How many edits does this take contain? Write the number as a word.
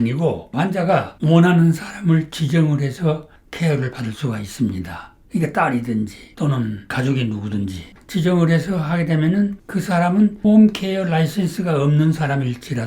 two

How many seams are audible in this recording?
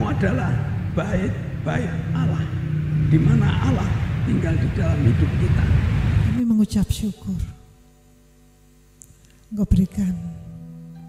one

